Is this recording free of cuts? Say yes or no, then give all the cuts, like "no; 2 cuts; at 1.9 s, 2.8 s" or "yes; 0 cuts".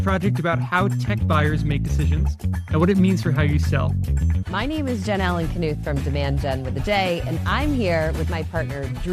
no; 1 cut; at 4.4 s